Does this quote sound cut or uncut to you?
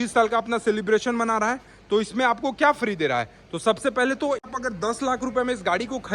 cut